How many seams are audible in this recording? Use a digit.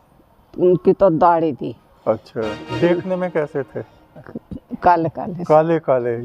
1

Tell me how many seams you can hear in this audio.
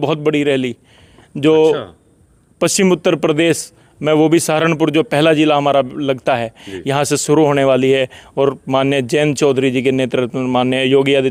0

